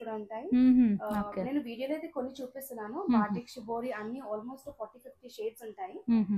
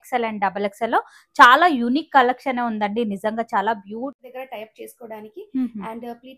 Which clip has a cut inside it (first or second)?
second